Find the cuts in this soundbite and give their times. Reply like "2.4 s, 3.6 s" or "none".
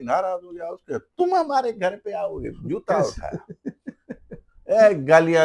none